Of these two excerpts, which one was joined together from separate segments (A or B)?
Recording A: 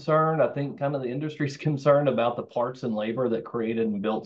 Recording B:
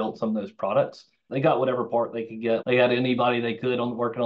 B